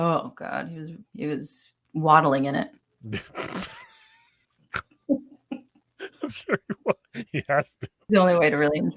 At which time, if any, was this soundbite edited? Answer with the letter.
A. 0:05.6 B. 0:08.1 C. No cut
B